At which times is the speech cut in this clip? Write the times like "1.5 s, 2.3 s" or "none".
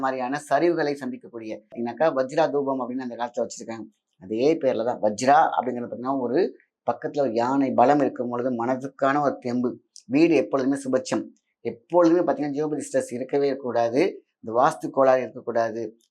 1.8 s